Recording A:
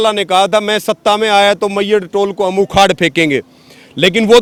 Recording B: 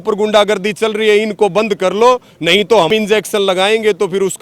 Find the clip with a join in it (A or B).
B